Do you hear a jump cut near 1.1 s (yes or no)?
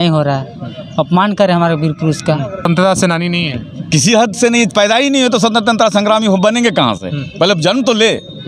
no